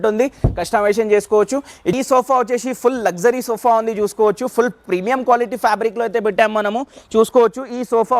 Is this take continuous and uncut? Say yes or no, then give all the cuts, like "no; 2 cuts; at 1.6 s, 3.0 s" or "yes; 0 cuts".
no; 1 cut; at 1.9 s